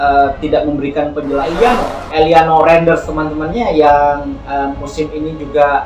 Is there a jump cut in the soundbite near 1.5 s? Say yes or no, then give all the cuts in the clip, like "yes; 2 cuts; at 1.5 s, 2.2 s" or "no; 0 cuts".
yes; 1 cut; at 1.5 s